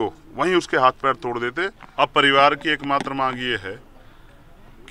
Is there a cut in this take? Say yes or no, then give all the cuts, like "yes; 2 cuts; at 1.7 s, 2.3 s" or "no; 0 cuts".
yes; 1 cut; at 1.8 s